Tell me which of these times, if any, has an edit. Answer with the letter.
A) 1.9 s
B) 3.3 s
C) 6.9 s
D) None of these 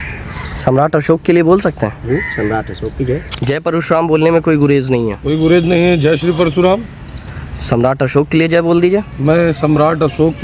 B